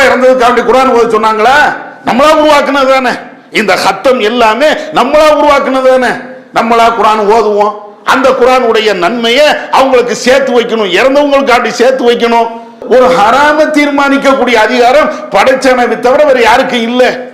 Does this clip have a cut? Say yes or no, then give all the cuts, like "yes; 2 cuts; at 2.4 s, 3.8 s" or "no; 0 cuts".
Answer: no; 0 cuts